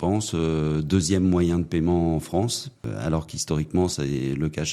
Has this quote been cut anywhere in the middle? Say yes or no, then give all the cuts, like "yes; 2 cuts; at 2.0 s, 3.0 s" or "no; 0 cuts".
yes; 1 cut; at 2.9 s